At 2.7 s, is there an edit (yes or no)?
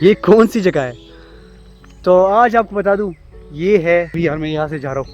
no